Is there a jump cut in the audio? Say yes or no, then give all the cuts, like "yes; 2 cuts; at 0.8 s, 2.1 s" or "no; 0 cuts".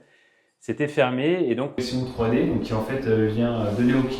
yes; 1 cut; at 1.8 s